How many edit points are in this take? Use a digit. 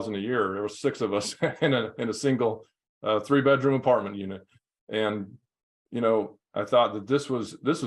0